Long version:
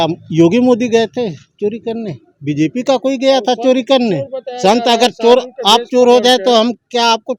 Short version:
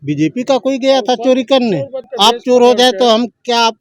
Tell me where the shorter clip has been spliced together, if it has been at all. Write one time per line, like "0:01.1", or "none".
0:02.1